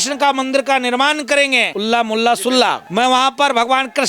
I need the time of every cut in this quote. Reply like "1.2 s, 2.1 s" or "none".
1.7 s, 2.8 s